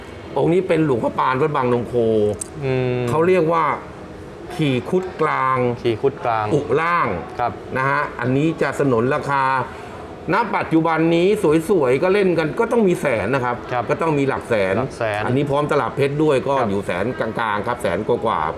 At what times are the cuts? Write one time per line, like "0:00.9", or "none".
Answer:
none